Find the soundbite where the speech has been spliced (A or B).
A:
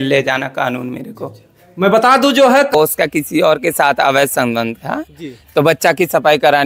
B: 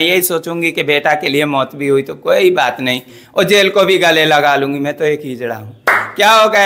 A